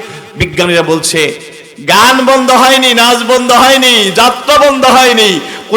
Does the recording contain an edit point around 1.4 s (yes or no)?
yes